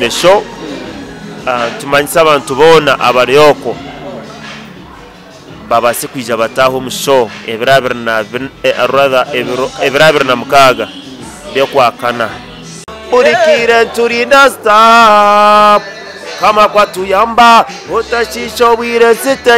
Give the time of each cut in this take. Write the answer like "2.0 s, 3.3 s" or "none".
12.9 s